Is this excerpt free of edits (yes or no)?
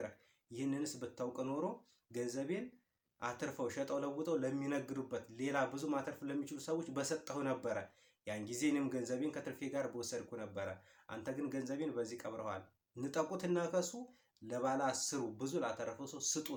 yes